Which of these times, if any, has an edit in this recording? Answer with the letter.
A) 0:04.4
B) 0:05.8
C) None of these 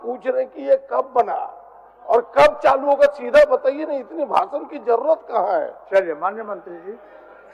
C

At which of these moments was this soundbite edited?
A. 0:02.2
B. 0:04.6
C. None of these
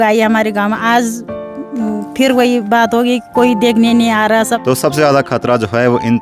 B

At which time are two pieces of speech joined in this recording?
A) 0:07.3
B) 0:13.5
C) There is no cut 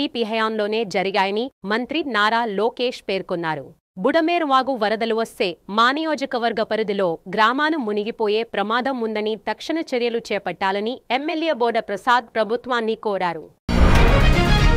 B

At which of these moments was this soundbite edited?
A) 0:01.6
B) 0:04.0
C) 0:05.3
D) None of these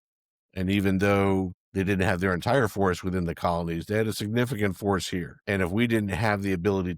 C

